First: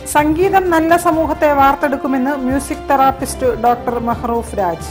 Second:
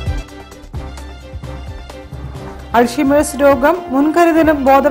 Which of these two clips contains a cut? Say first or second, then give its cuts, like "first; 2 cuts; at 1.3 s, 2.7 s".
second; 1 cut; at 1.5 s